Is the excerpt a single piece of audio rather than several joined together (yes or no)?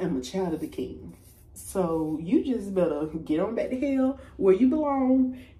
yes